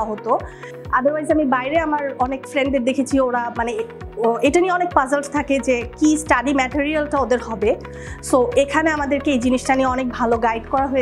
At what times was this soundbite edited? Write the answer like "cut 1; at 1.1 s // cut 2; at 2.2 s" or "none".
none